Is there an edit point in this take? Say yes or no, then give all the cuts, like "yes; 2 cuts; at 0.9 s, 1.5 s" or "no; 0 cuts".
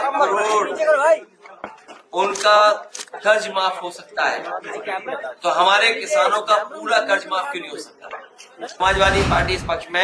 yes; 1 cut; at 8.7 s